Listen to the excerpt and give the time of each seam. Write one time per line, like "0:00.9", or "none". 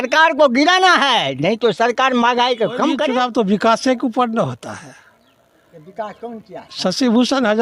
0:03.0
0:06.7